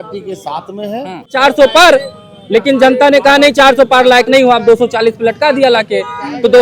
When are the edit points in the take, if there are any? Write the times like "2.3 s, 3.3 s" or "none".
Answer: 1.3 s